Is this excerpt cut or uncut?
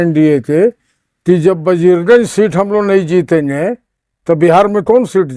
uncut